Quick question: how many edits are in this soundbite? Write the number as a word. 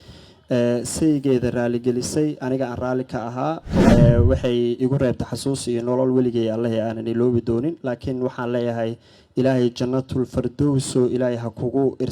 one